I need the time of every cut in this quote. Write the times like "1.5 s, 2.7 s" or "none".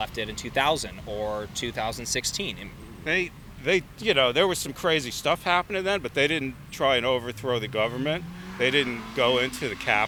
none